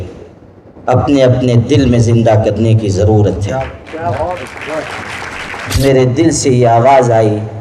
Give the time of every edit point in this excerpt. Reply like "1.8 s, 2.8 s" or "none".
5.8 s